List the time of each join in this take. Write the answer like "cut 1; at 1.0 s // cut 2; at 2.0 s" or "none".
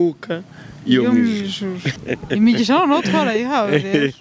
cut 1; at 1.9 s